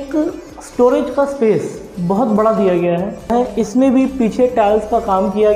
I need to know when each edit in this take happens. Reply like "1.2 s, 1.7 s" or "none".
3.4 s